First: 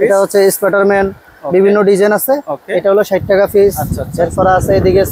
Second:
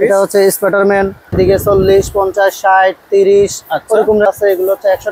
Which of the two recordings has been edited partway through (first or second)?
second